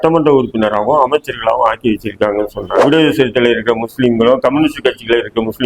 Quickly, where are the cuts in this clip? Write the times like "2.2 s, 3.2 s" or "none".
2.7 s